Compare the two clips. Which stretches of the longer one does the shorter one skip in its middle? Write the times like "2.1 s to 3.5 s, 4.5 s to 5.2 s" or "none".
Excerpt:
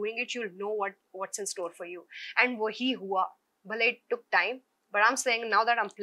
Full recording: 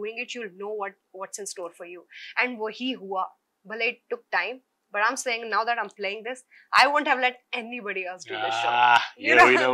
none